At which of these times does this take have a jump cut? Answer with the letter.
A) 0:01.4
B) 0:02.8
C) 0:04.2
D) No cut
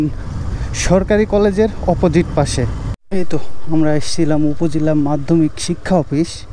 B